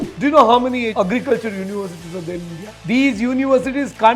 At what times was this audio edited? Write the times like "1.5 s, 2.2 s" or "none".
0.9 s, 2.7 s